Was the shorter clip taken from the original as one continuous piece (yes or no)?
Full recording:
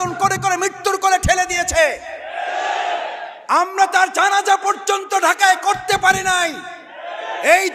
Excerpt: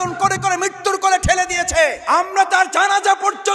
no